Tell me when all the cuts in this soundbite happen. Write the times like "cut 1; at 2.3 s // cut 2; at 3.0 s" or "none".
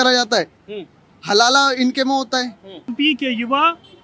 cut 1; at 2.9 s